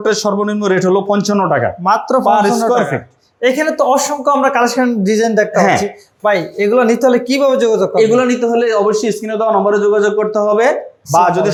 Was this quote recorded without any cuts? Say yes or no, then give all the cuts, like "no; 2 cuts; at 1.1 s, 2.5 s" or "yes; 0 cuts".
yes; 0 cuts